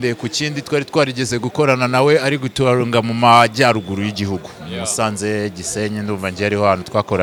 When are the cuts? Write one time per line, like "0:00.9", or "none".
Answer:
none